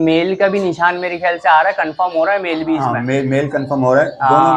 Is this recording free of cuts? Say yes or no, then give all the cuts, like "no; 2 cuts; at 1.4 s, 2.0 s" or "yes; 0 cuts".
yes; 0 cuts